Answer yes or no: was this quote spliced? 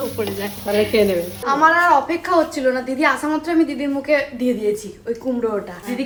no